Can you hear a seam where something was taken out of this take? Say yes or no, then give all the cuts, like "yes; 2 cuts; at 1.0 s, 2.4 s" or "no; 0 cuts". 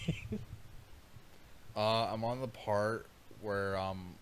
no; 0 cuts